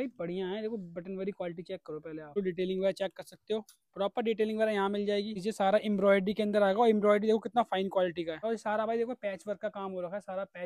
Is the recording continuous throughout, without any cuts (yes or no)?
no